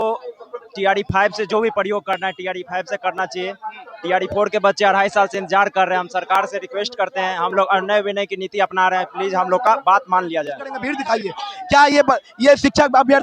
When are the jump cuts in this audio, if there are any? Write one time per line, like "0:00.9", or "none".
0:10.9